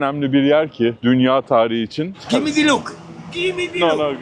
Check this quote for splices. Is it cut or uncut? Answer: cut